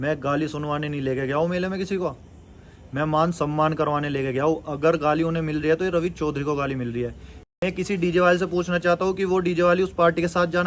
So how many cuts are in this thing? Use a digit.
0